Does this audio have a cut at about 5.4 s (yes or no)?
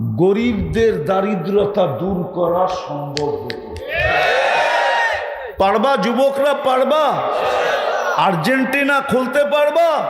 yes